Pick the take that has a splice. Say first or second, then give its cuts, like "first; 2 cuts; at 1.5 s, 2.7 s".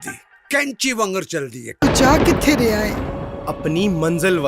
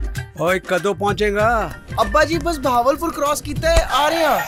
first; 1 cut; at 1.8 s